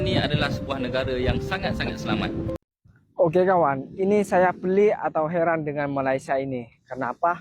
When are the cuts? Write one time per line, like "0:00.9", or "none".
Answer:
0:02.6